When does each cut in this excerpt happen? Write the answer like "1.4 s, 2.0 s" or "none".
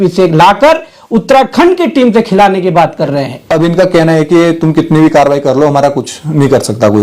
3.4 s

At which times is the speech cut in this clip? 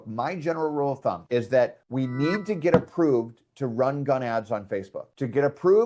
1.2 s, 1.8 s

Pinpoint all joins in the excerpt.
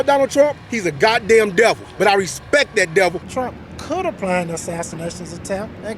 1.9 s, 3.2 s

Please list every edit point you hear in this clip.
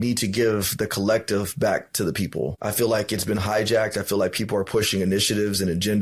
2.6 s

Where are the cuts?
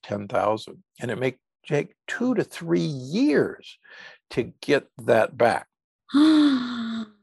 none

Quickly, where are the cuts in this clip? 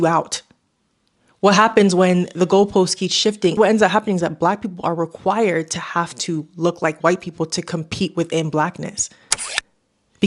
3.5 s

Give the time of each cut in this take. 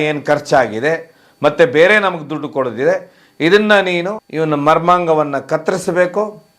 4.2 s

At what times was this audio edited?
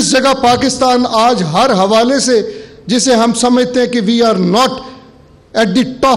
none

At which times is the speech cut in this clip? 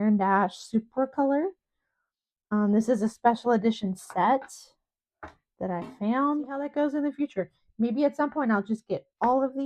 6.6 s

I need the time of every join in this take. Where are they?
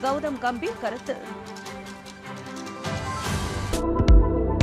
3.7 s

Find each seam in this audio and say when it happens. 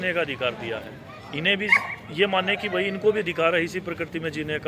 none

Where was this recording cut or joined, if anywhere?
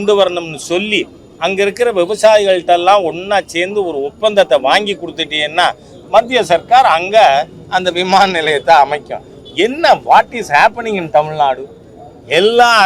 none

